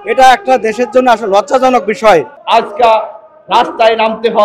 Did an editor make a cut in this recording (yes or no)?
yes